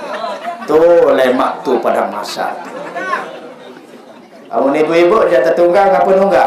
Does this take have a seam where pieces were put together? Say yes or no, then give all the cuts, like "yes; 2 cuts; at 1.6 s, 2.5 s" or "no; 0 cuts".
no; 0 cuts